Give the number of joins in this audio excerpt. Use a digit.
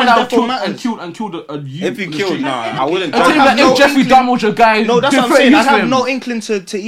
1